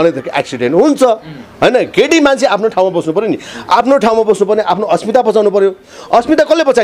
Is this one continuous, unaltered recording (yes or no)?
yes